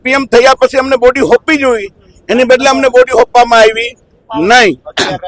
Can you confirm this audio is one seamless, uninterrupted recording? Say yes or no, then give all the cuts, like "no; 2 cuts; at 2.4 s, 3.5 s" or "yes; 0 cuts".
yes; 0 cuts